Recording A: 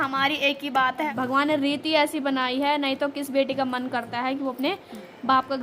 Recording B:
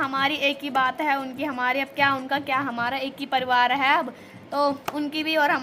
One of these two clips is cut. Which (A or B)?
A